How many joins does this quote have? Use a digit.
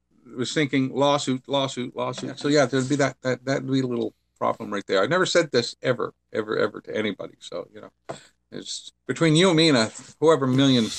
1